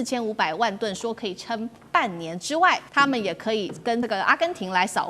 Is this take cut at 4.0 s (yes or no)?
yes